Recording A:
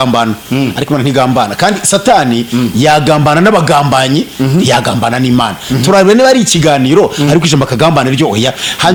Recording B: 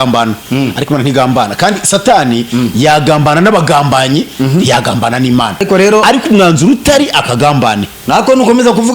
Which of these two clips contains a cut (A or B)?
B